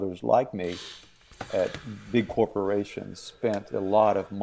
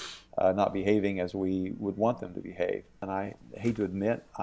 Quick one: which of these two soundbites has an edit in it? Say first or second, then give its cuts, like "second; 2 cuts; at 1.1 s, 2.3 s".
second; 1 cut; at 3.0 s